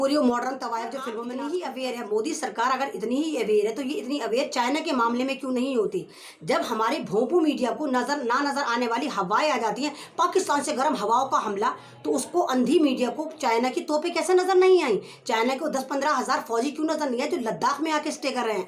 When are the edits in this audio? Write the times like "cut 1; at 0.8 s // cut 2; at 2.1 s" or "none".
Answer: cut 1; at 1.0 s